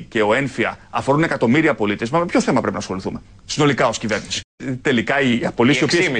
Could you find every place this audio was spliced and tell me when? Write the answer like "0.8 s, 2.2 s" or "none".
4.6 s